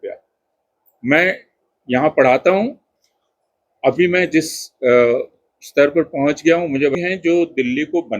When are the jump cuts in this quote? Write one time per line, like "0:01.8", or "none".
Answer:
0:07.0